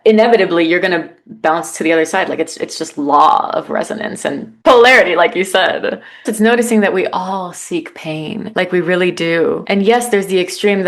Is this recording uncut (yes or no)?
no